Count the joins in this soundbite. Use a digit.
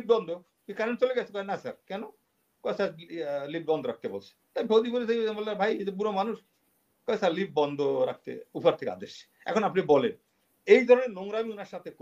0